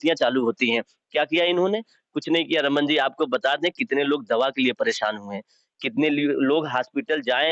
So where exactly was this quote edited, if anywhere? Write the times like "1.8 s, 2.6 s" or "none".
none